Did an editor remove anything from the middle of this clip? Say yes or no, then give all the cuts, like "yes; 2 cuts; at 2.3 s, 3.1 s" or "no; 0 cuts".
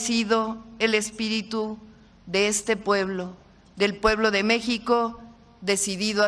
no; 0 cuts